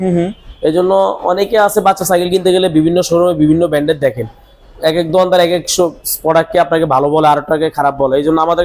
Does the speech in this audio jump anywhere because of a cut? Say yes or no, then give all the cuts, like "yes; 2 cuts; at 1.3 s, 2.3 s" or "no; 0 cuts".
no; 0 cuts